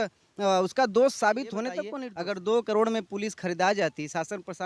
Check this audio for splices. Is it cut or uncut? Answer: cut